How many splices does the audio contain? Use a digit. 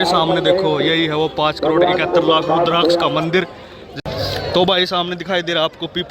1